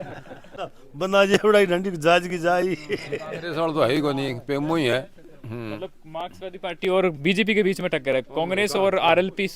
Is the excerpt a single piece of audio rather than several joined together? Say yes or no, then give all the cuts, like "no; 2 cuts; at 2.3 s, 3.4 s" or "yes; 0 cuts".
no; 1 cut; at 3.3 s